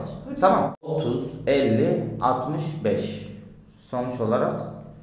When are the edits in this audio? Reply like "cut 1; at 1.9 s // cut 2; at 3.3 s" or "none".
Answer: cut 1; at 0.9 s